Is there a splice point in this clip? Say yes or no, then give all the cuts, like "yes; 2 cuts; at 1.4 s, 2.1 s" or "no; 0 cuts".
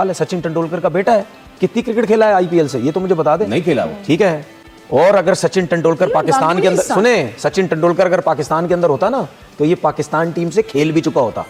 no; 0 cuts